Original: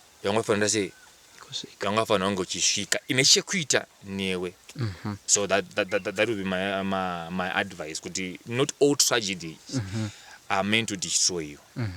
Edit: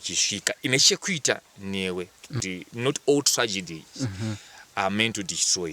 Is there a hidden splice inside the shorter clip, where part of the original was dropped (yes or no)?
yes